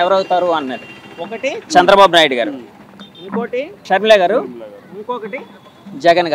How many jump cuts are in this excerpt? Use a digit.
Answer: 1